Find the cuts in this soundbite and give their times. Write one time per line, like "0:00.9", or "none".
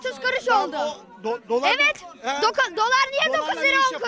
none